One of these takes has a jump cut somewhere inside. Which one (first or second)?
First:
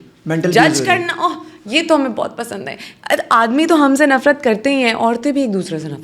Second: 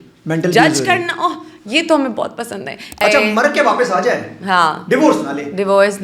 second